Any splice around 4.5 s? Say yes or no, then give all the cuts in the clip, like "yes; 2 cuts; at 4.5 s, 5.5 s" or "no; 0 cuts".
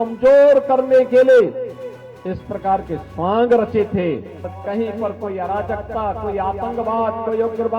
yes; 1 cut; at 4.5 s